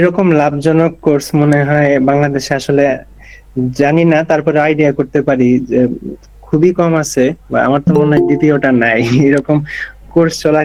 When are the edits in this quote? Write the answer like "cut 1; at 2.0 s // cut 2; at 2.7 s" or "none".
none